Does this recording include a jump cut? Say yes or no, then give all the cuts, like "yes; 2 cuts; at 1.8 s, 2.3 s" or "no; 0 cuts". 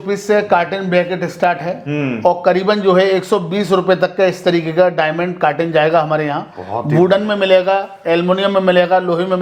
no; 0 cuts